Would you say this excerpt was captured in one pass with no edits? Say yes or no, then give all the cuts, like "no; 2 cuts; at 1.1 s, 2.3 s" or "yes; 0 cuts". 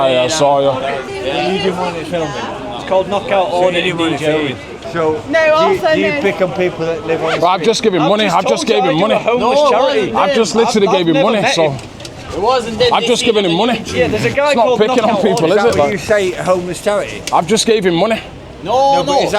no; 2 cuts; at 1.1 s, 4.7 s